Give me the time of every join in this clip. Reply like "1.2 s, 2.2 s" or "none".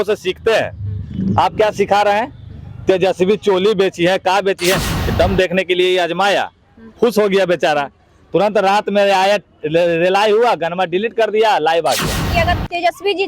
4.9 s, 12.3 s